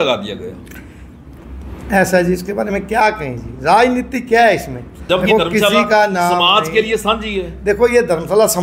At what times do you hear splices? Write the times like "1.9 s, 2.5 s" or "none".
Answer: 5.0 s

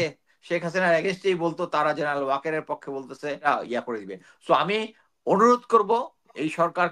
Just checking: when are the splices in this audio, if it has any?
3.5 s

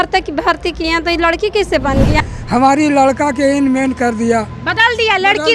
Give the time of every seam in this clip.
2.2 s

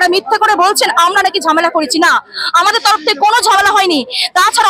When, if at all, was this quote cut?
none

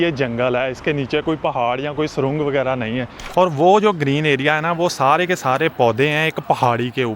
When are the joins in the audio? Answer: 3.1 s

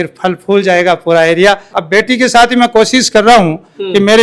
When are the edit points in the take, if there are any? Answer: 1.8 s

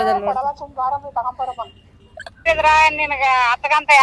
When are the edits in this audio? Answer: 2.5 s

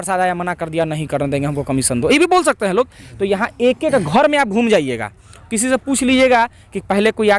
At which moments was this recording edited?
none

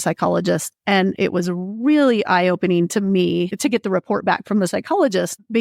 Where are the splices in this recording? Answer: 1.1 s

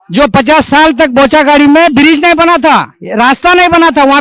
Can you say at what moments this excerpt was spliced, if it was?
none

